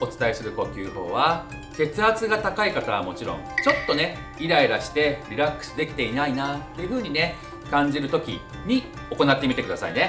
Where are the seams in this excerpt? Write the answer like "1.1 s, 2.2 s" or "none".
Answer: 3.5 s, 9.0 s